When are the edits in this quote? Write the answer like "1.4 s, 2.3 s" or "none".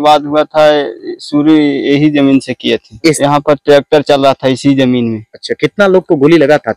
3.2 s